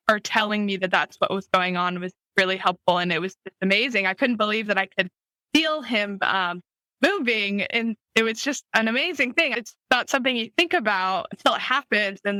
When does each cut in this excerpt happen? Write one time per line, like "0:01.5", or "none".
none